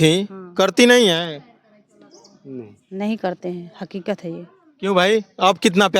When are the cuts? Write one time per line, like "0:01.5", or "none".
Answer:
none